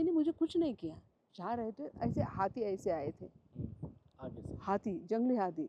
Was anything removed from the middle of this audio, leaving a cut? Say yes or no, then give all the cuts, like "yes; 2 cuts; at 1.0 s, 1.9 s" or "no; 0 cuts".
yes; 1 cut; at 1.3 s